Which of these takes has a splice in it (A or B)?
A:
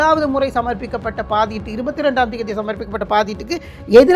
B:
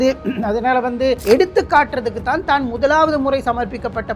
B